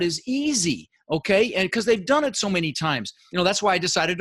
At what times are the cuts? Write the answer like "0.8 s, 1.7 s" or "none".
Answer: 3.2 s